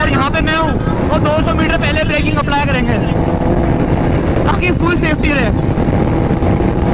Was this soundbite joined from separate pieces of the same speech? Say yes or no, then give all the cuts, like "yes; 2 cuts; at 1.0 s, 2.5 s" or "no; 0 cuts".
no; 0 cuts